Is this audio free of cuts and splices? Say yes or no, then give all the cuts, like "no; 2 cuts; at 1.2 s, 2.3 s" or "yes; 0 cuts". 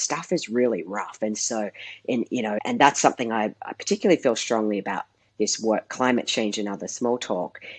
no; 1 cut; at 2.6 s